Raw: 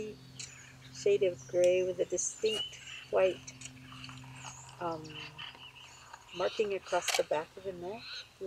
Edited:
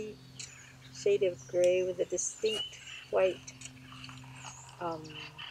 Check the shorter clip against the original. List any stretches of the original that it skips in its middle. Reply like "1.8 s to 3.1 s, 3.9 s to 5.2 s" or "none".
none